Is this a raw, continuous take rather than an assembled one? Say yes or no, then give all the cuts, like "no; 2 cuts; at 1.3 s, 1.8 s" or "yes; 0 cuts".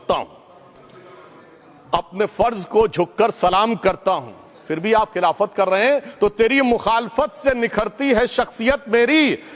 yes; 0 cuts